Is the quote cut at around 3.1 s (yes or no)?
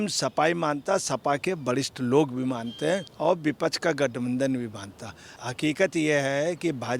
yes